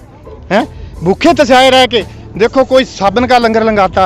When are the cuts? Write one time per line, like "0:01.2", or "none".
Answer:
none